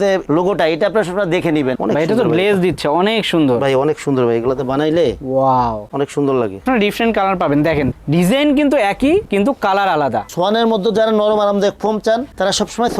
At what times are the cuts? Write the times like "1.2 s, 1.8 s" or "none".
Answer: 1.7 s, 6.6 s, 10.2 s